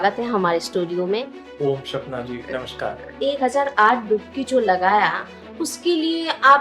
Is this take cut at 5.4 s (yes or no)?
no